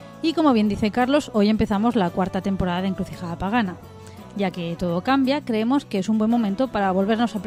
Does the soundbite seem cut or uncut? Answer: uncut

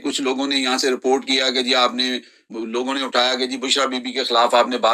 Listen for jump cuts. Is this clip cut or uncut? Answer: cut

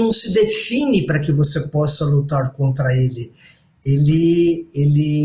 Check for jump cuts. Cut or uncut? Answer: uncut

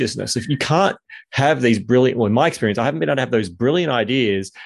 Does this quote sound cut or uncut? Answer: uncut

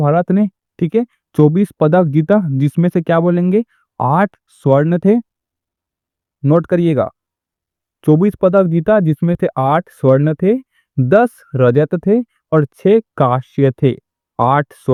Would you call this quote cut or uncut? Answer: uncut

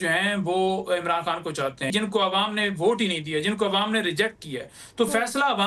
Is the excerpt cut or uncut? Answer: cut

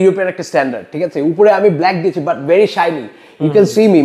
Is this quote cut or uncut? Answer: uncut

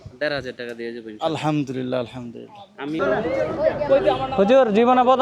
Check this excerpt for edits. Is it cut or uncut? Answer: cut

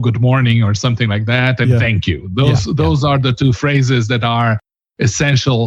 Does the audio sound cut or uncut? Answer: uncut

